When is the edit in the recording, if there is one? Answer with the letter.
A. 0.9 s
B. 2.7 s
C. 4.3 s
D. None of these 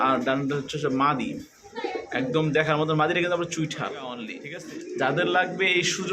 C